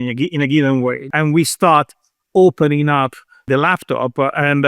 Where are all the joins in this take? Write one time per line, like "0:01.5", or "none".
0:01.1
0:03.4